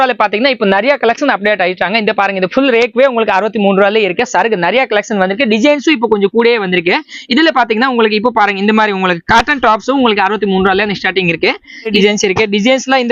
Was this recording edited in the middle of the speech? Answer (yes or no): yes